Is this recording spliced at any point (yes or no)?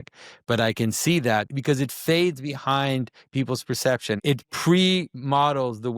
yes